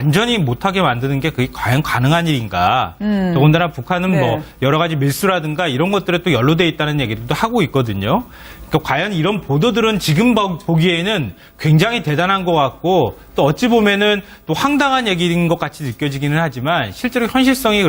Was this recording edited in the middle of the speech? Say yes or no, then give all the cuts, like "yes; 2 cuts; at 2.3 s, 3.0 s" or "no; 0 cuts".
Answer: yes; 1 cut; at 2.3 s